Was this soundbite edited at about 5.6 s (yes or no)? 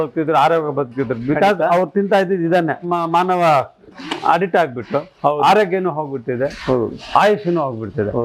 no